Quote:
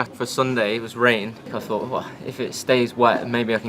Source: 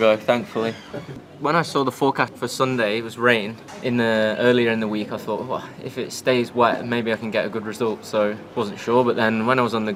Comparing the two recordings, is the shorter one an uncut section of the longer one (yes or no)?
no